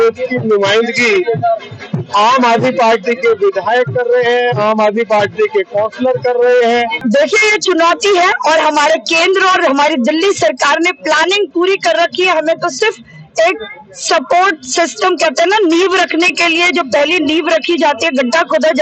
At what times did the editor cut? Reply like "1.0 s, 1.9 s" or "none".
7.0 s